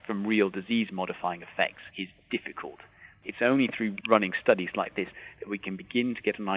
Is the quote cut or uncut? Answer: cut